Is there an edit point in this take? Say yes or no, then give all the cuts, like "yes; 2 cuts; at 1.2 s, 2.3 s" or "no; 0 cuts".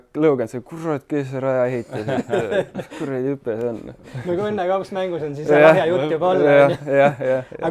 no; 0 cuts